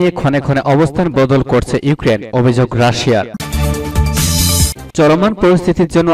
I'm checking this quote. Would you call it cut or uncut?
cut